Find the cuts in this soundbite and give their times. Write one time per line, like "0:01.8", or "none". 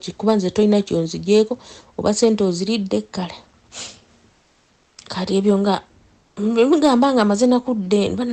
none